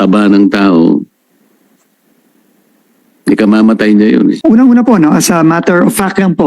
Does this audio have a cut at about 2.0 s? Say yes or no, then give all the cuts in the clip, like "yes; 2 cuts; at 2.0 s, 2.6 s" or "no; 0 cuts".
no; 1 cut; at 4.4 s